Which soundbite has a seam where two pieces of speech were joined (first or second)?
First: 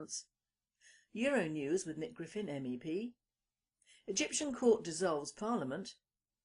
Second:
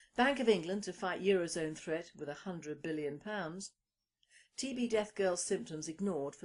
first